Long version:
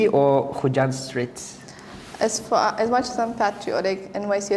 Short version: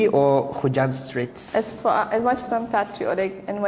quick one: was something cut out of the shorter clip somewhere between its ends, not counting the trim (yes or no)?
yes